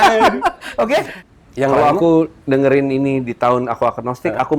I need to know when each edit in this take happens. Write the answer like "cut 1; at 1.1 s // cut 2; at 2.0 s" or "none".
cut 1; at 1.2 s